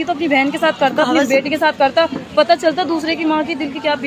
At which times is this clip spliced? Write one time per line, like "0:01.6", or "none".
none